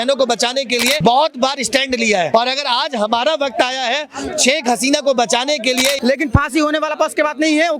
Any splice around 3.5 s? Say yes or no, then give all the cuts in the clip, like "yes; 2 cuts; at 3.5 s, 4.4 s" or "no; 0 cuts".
no; 3 cuts; at 1.0 s, 2.3 s, 6.0 s